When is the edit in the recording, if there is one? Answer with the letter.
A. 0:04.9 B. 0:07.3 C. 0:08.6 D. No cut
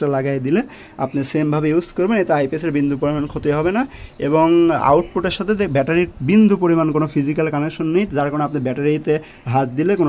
D